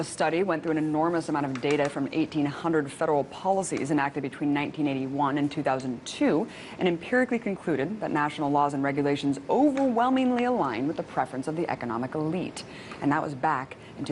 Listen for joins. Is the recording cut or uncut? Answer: cut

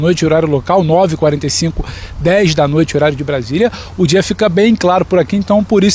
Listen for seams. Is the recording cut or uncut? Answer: uncut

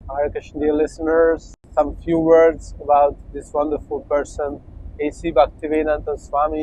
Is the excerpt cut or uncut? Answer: cut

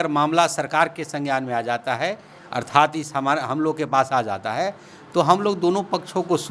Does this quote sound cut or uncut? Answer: uncut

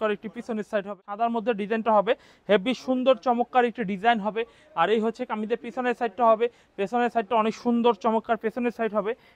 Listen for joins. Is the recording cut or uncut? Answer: cut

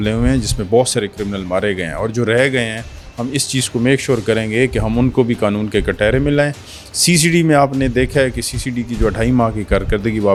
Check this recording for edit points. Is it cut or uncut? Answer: uncut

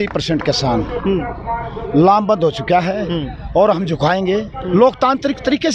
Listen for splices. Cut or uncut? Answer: uncut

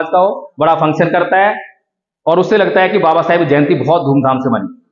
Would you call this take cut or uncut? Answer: uncut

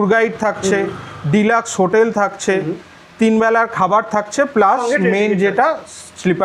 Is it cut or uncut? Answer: uncut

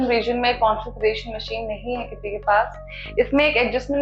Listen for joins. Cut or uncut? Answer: uncut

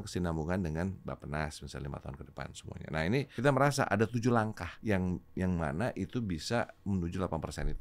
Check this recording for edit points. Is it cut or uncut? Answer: cut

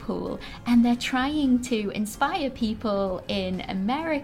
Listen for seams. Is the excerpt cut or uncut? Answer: uncut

